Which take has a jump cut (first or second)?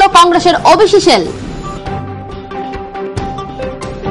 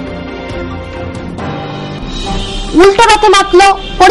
second